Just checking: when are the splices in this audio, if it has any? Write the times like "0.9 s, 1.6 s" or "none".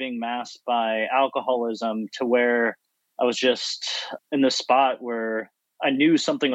4.1 s